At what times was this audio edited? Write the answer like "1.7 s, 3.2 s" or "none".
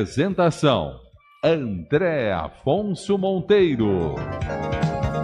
4.3 s